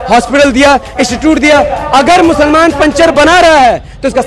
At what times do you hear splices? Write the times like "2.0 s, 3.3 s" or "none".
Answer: 1.8 s